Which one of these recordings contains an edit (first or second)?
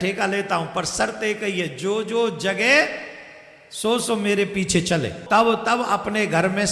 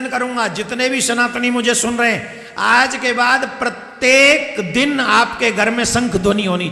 first